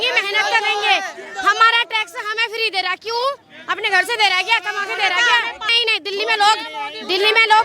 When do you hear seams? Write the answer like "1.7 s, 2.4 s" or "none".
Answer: 5.7 s